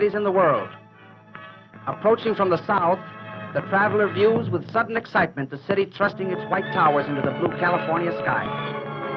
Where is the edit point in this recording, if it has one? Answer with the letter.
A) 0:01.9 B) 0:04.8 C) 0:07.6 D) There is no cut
C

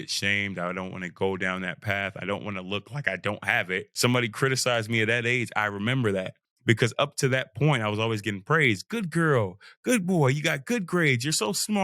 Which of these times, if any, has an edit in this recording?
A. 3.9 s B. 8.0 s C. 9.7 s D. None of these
A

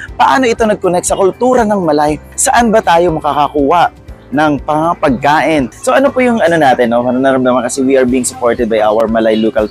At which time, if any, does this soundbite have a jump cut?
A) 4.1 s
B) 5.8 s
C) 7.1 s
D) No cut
B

